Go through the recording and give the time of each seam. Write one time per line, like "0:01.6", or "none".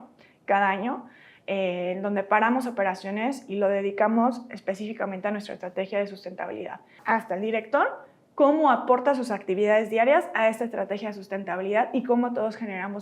0:07.0